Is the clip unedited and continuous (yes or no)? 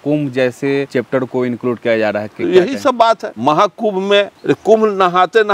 no